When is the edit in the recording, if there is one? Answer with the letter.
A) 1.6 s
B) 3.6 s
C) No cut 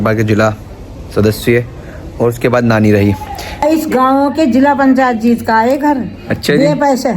B